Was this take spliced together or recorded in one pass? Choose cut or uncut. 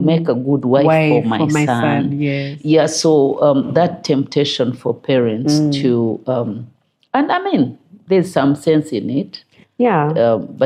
uncut